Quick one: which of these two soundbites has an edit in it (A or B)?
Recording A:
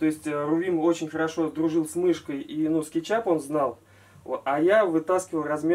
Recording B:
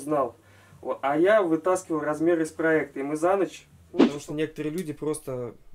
B